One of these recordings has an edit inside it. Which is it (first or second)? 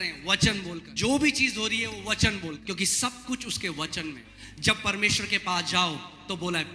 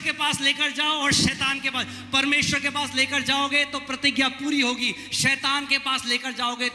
first